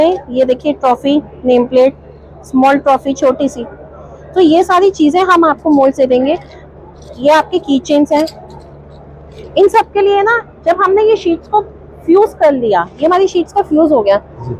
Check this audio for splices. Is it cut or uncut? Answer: uncut